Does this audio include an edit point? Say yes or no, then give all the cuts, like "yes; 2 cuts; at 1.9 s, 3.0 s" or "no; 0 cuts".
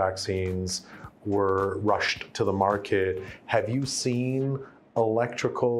no; 0 cuts